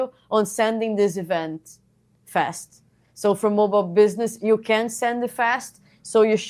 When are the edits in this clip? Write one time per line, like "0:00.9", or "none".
none